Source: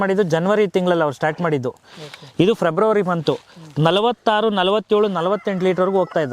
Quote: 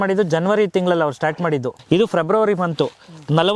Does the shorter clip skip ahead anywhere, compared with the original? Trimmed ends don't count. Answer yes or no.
yes